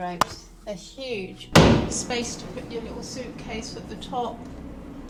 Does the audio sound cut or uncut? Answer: uncut